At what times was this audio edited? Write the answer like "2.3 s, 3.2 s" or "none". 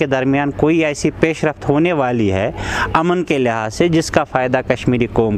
none